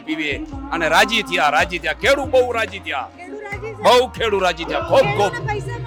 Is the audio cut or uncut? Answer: uncut